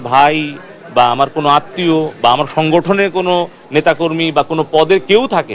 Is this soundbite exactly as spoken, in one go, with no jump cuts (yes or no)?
yes